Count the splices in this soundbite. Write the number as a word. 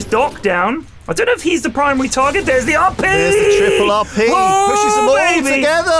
zero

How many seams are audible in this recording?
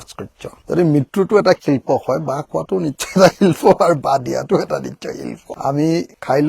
one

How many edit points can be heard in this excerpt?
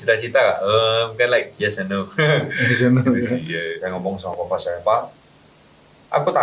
one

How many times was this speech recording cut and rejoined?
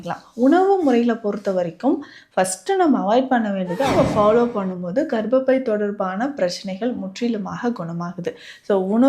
one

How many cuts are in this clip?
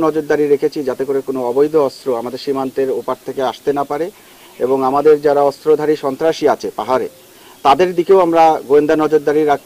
zero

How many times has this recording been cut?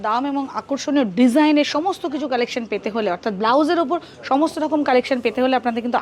zero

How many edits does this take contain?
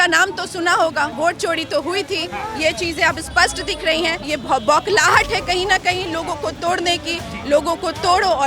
two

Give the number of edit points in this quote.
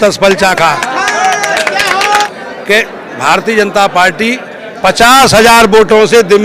one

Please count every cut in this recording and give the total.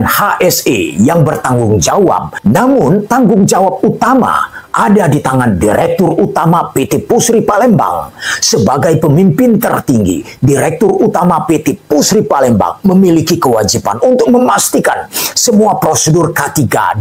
one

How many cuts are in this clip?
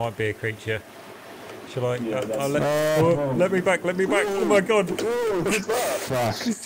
one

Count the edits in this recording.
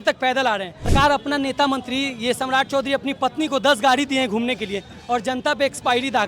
one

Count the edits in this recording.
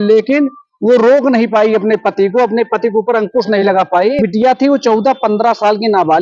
one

